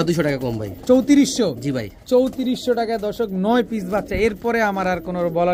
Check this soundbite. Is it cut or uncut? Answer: uncut